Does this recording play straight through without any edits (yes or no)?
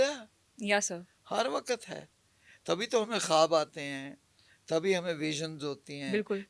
yes